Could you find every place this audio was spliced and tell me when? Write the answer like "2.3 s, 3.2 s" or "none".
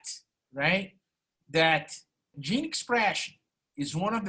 2.3 s